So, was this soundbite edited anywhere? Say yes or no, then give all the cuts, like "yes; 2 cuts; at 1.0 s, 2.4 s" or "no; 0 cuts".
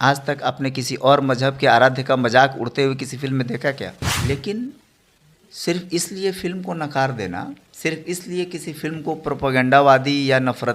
yes; 1 cut; at 4.0 s